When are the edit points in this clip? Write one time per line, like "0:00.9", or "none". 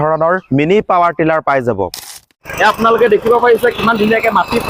0:02.2